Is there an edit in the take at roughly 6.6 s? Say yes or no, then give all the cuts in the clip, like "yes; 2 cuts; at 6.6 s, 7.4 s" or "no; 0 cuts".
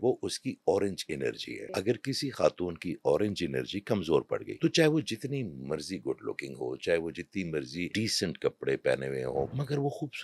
no; 4 cuts; at 1.5 s, 4.5 s, 7.9 s, 9.5 s